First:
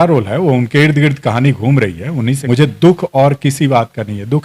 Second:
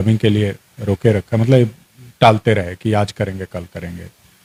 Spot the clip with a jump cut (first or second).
first